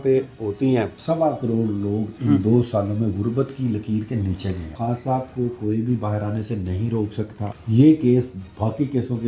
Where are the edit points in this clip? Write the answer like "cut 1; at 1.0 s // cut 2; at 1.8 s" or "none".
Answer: cut 1; at 1.0 s // cut 2; at 4.8 s // cut 3; at 7.4 s